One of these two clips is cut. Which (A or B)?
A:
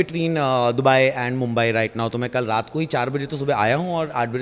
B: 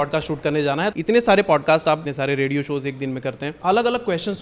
B